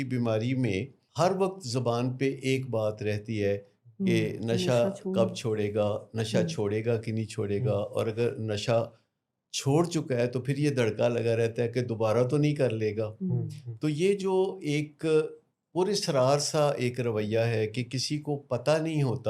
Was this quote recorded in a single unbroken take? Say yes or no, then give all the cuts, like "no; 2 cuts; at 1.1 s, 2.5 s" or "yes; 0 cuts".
no; 1 cut; at 1.0 s